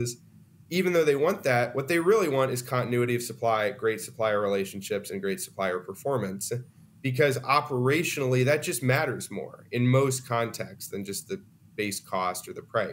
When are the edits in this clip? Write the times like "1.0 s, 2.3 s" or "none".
none